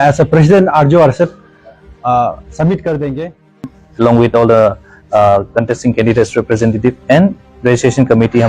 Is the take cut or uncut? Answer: cut